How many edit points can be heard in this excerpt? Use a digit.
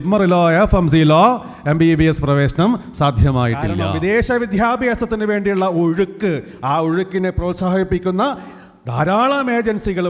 1